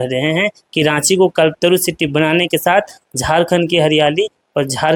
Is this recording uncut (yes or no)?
yes